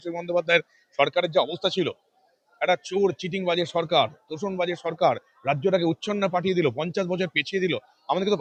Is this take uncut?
yes; 0 cuts

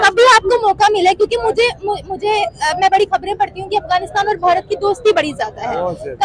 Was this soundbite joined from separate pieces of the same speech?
no; 0 cuts

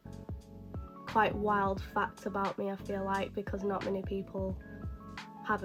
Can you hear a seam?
no; 0 cuts

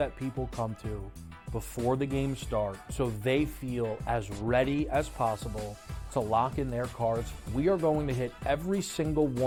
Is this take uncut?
yes; 0 cuts

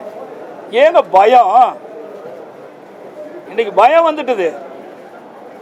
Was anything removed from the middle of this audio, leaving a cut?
no; 0 cuts

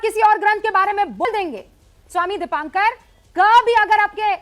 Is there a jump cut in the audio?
yes; 1 cut; at 1.2 s

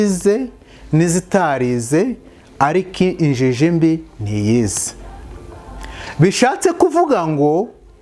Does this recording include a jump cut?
no; 0 cuts

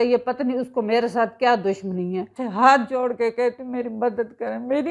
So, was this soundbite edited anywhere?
yes; 1 cut; at 2.4 s

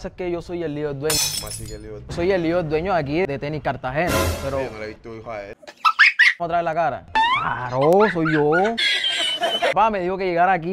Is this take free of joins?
no; 3 cuts; at 2.1 s, 6.4 s, 9.7 s

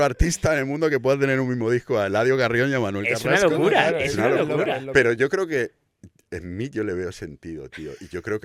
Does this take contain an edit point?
no; 0 cuts

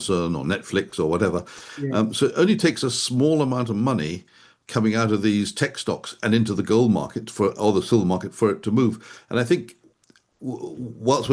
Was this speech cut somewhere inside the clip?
no; 0 cuts

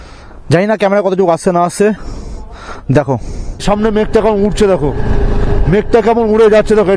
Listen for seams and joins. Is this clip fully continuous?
no; 1 cut; at 3.6 s

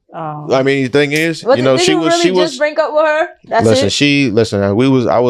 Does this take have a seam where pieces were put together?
no; 0 cuts

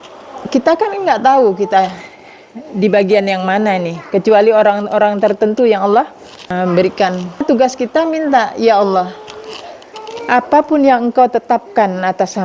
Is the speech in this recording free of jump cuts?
no; 2 cuts; at 6.5 s, 7.4 s

